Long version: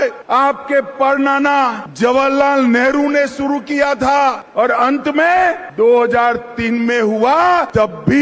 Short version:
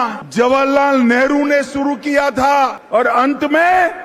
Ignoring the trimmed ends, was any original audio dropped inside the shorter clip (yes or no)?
no